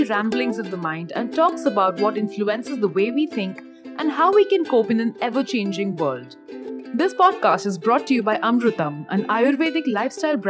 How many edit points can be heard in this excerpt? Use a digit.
0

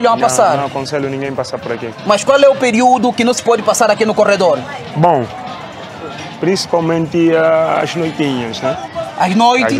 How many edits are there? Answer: 0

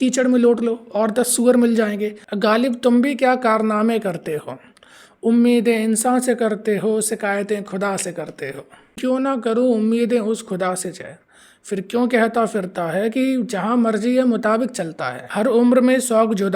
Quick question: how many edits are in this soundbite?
3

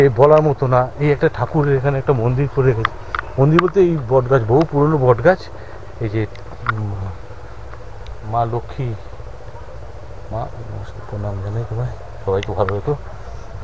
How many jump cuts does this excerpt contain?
0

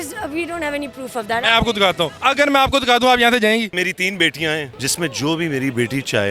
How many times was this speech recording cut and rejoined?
3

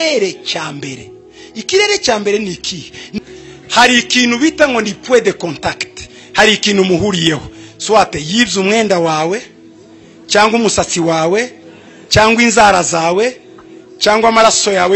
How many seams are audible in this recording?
1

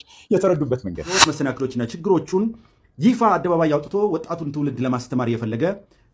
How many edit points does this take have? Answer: 1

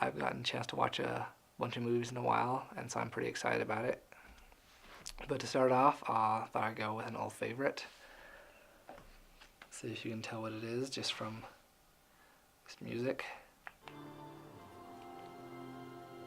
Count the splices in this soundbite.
1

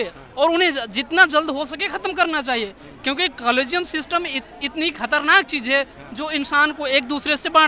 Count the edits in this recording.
0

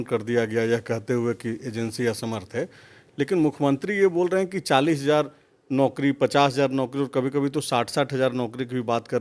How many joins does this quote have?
0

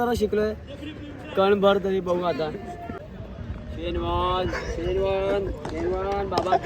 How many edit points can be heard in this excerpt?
1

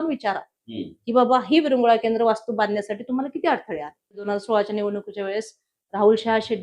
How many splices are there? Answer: 1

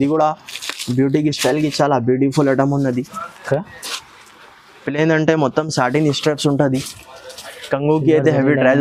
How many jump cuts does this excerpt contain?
0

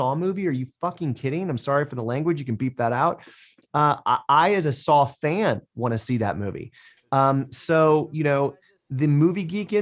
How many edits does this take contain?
0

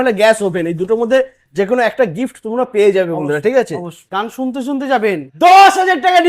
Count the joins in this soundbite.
2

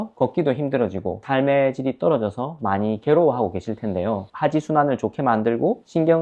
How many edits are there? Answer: 1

